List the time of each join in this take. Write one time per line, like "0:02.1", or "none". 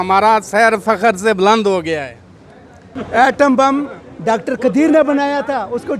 0:02.9